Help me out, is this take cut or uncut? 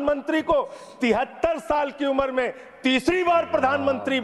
uncut